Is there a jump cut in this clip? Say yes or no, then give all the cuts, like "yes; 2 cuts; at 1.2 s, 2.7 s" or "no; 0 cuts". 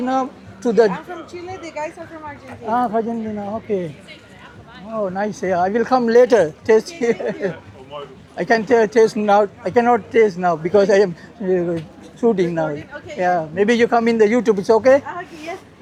no; 0 cuts